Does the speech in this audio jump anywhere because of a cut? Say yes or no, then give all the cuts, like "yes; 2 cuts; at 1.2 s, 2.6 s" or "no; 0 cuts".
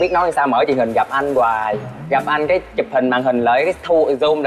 no; 0 cuts